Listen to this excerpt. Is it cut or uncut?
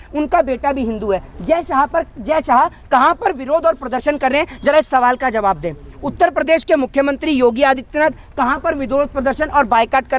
uncut